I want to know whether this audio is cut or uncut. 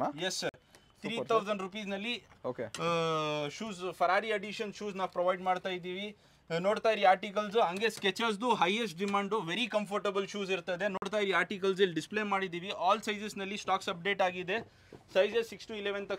uncut